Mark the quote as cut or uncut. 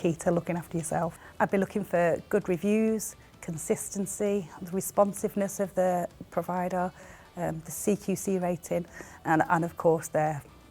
cut